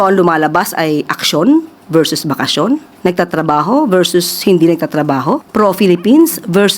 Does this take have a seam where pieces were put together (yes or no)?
yes